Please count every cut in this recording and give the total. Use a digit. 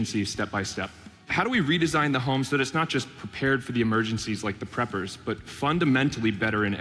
1